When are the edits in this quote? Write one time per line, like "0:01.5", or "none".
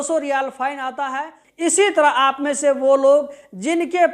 0:01.4